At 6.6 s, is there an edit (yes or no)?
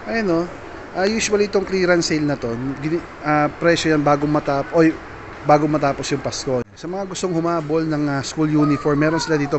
yes